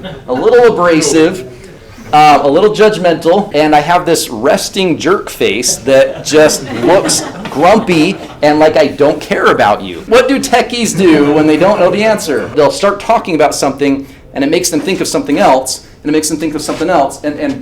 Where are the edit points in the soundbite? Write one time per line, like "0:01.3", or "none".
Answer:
0:03.5
0:10.1
0:12.5